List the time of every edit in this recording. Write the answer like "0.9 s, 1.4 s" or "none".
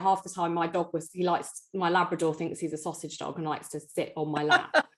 none